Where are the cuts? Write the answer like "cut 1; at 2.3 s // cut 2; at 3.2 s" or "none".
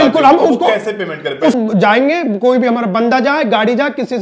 cut 1; at 1.6 s